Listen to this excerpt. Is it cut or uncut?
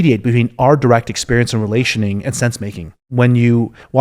cut